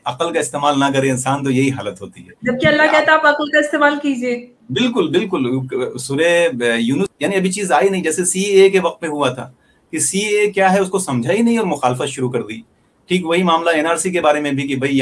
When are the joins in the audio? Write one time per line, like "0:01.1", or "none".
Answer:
0:07.1